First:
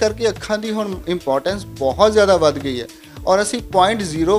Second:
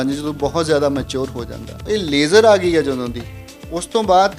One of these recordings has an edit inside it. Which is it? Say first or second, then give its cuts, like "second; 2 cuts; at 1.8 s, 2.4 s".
second; 1 cut; at 1.8 s